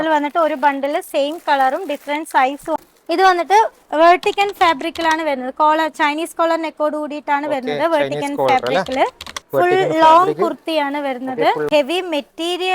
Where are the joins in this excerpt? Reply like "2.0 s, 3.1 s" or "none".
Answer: 2.8 s, 11.7 s